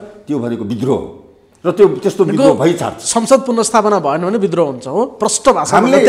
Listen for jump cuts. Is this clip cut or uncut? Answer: uncut